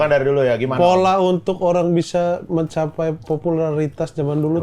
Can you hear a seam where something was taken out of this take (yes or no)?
no